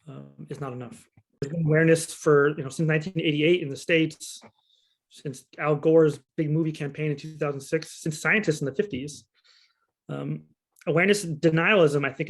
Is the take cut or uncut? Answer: cut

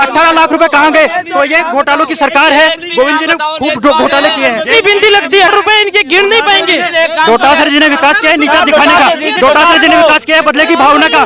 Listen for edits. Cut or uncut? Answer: cut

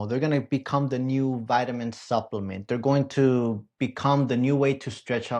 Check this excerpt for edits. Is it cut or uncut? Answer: uncut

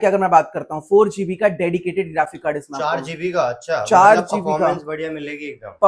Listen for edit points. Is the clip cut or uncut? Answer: uncut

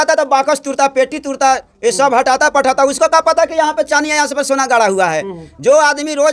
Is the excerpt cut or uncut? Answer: uncut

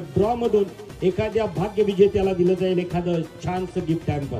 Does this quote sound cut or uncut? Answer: uncut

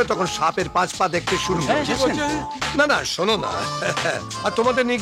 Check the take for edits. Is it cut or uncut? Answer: uncut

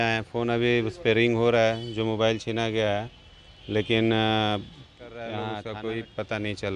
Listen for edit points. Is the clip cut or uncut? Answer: cut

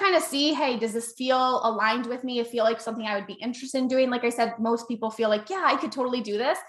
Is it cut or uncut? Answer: uncut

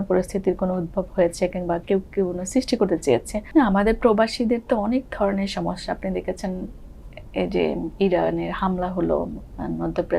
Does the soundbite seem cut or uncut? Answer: cut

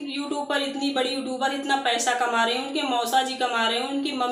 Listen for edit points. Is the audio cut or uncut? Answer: uncut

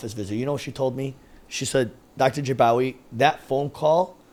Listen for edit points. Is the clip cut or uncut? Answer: uncut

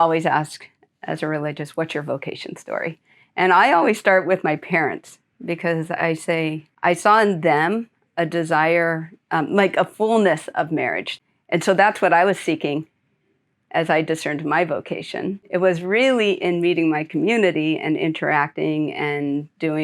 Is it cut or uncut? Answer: cut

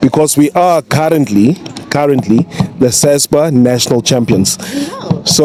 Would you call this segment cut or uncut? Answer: uncut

